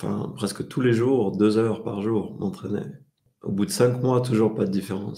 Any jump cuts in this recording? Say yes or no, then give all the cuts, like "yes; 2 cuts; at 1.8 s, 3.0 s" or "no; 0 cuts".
yes; 1 cut; at 3.2 s